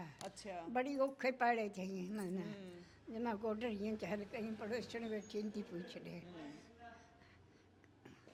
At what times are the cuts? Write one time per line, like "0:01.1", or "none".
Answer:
none